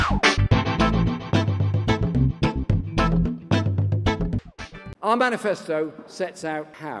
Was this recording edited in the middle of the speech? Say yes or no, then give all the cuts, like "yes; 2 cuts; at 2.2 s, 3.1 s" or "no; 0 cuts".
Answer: yes; 1 cut; at 4.5 s